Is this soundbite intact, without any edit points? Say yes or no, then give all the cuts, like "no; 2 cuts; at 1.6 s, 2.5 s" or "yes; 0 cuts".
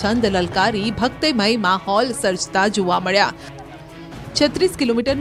yes; 0 cuts